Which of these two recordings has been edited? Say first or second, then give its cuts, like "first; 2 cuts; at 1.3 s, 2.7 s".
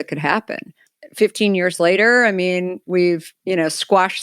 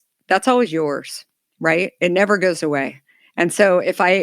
first; 1 cut; at 3.3 s